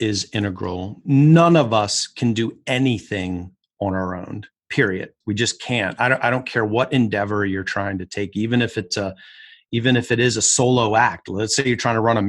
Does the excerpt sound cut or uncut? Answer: cut